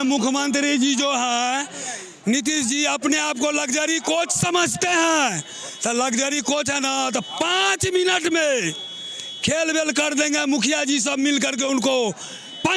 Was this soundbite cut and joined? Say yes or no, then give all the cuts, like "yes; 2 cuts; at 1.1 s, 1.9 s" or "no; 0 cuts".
no; 0 cuts